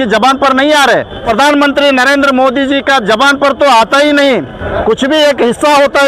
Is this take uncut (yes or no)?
no